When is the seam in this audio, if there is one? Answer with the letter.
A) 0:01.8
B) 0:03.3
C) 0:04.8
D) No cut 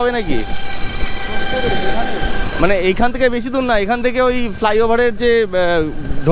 D